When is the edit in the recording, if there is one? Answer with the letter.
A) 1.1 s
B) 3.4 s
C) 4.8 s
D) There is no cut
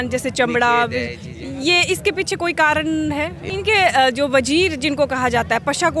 B